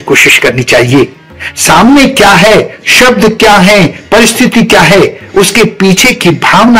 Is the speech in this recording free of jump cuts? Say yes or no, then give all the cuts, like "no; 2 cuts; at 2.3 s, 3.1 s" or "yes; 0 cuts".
yes; 0 cuts